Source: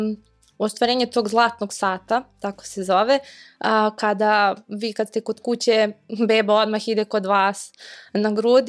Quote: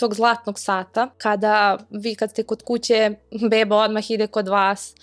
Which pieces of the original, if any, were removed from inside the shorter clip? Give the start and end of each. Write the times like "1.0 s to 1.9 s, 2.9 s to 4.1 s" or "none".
2.3 s to 4.0 s